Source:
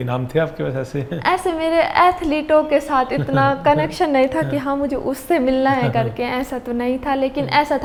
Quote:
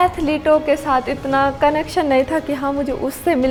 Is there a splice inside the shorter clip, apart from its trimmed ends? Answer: no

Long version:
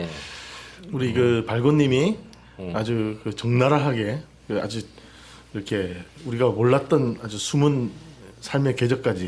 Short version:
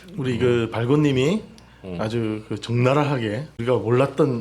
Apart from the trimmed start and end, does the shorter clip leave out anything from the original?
yes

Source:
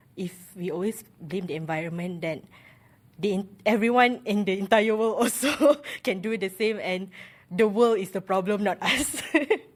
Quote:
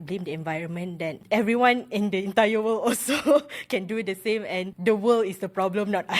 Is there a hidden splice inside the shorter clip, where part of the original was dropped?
yes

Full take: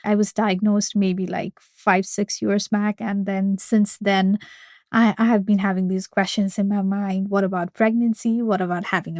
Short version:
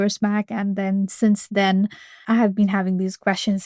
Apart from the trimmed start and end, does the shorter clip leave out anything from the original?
yes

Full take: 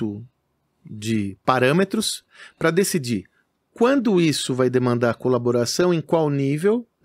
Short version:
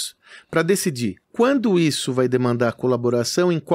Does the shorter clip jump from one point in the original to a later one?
yes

